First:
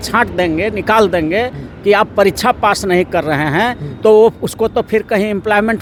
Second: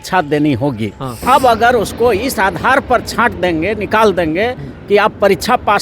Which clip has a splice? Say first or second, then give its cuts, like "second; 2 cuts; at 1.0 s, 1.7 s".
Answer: second; 1 cut; at 1.2 s